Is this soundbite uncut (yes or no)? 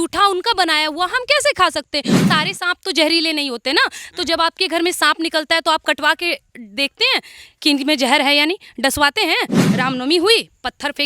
no